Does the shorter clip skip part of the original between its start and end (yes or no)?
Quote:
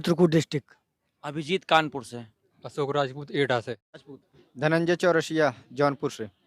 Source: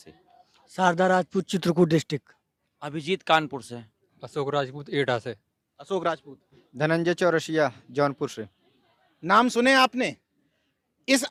yes